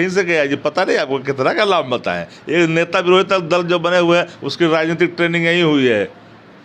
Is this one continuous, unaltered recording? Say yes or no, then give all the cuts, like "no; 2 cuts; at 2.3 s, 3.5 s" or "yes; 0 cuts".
yes; 0 cuts